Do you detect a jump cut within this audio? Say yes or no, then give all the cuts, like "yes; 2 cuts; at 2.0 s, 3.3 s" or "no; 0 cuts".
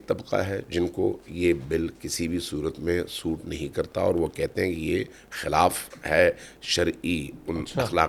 no; 0 cuts